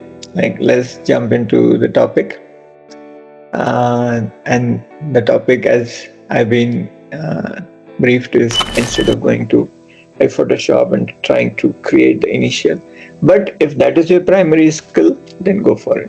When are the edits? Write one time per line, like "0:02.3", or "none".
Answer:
0:08.8